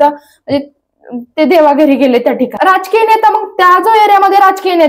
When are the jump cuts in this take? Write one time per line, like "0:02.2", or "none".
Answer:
0:02.5